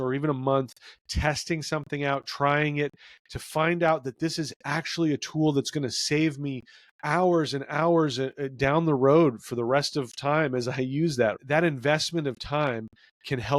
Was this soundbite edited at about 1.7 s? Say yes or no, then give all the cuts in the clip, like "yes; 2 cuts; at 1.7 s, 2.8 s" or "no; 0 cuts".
no; 1 cut; at 11.4 s